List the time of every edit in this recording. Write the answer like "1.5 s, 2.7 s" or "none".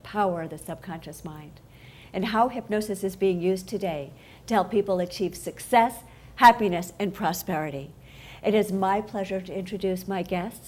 9.1 s